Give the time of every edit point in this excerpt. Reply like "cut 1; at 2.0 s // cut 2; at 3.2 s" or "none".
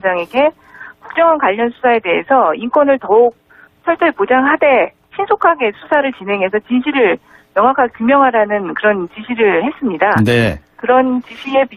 none